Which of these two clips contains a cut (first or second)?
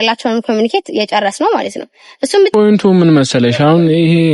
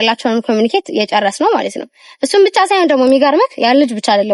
first